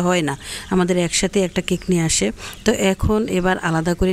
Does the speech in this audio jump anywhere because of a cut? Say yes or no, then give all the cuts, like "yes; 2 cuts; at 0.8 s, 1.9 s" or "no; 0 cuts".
no; 0 cuts